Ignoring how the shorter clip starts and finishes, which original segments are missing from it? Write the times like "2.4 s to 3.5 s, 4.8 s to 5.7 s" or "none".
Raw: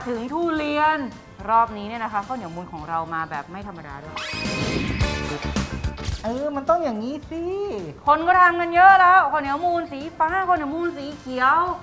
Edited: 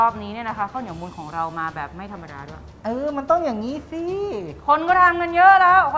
4.2 s to 6.0 s